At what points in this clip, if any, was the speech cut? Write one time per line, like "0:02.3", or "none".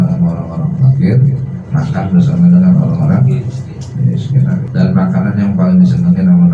0:01.6
0:04.6